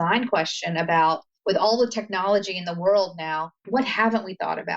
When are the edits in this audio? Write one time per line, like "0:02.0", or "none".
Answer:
0:01.3
0:03.6